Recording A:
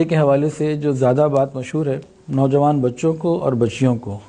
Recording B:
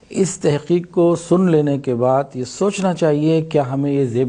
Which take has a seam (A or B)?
A